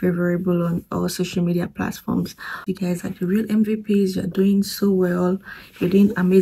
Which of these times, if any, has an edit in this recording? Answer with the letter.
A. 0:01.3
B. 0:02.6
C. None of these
B